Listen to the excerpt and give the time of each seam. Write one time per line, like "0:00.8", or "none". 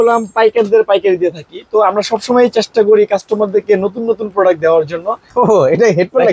0:05.2